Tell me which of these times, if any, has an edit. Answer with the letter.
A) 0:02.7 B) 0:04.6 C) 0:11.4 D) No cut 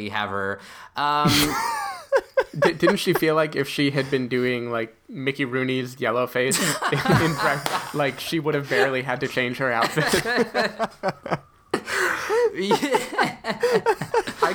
A